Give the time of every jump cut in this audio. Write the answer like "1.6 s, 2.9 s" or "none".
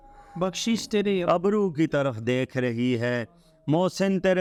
none